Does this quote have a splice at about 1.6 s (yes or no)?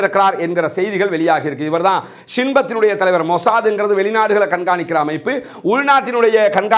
no